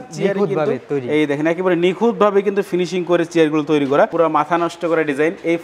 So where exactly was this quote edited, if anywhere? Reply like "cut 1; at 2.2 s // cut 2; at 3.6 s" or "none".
cut 1; at 4.1 s